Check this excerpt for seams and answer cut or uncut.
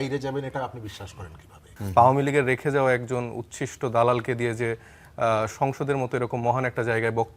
cut